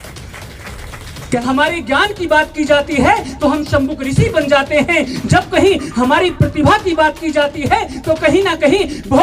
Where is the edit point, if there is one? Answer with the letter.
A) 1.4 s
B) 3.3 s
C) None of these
A